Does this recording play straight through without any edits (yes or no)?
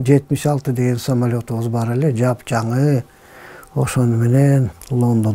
yes